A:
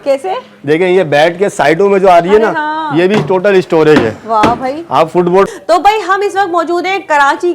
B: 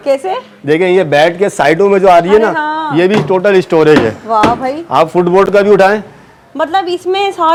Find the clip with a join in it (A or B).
A